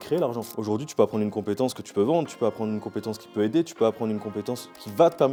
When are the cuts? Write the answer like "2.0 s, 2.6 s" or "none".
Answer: none